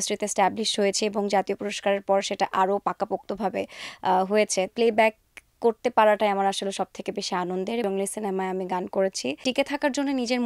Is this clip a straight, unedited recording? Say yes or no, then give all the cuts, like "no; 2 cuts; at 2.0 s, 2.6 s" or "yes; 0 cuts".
no; 3 cuts; at 4.7 s, 7.8 s, 9.4 s